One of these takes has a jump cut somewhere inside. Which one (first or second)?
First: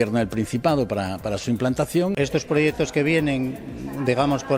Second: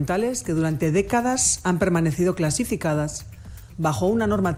first